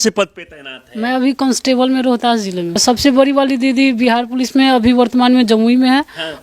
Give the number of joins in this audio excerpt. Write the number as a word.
one